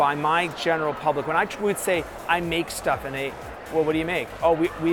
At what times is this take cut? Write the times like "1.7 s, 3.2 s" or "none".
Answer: none